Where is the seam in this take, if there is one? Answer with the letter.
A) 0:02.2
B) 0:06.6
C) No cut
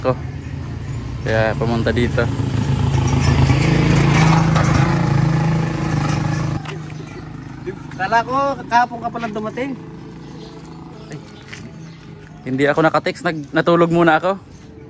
B